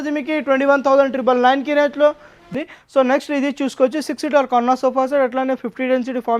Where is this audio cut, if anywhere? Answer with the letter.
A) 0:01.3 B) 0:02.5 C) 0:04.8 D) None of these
B